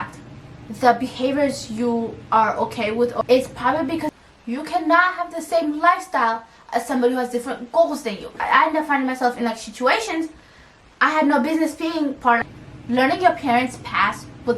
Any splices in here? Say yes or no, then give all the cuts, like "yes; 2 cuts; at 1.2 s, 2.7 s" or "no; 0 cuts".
yes; 4 cuts; at 3.2 s, 4.1 s, 8.3 s, 12.4 s